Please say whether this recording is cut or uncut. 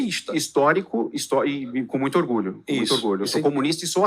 uncut